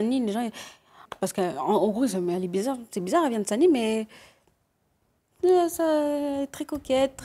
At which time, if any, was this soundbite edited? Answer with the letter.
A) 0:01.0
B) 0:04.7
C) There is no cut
A